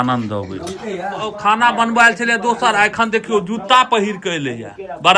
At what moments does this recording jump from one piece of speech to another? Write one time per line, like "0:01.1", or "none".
0:01.3